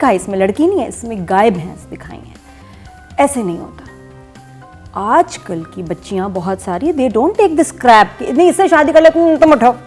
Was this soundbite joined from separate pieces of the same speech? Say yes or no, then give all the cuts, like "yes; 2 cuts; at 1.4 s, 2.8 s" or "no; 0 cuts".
no; 0 cuts